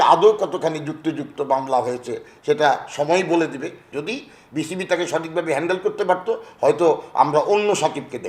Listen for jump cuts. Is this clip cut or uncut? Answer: cut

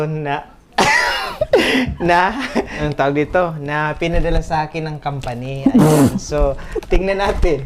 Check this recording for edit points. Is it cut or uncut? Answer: cut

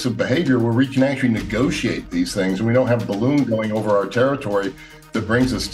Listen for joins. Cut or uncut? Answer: uncut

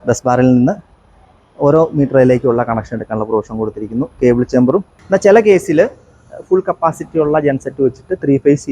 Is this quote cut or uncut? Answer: cut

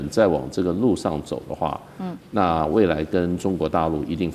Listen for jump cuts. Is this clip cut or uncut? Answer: uncut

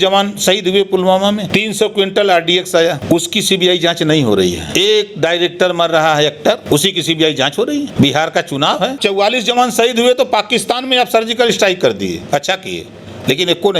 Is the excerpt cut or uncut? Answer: cut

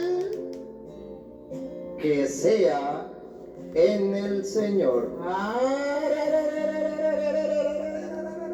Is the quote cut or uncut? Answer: uncut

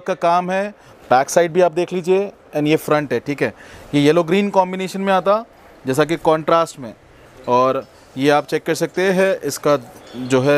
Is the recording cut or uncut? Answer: uncut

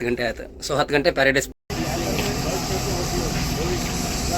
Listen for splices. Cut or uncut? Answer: cut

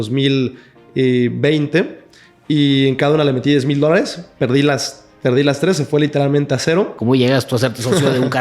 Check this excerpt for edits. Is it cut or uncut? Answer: cut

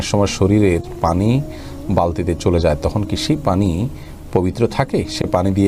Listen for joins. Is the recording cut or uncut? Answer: uncut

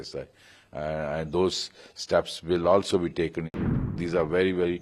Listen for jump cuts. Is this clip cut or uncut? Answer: cut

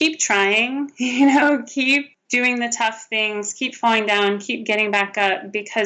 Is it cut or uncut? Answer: cut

